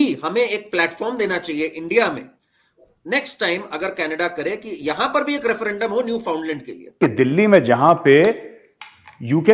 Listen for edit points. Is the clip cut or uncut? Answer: cut